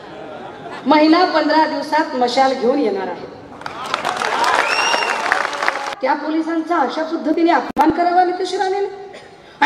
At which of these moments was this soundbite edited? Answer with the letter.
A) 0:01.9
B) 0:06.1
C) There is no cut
B